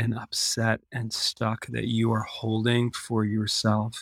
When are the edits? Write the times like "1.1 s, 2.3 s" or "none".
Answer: none